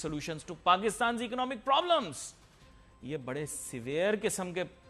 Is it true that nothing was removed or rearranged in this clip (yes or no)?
yes